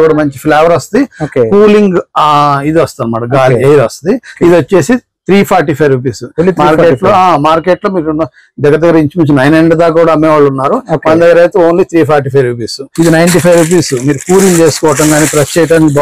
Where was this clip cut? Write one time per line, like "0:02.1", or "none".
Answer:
0:04.3
0:12.8